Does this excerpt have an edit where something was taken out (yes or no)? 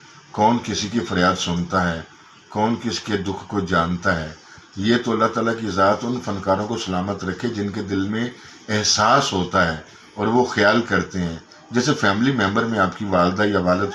no